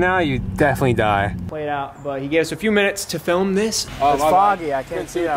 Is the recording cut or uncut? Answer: cut